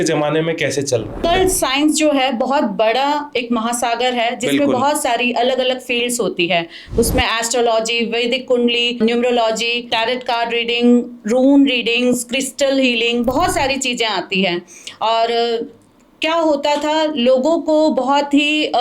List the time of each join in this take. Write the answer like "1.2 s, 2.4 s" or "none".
1.1 s, 9.0 s, 9.9 s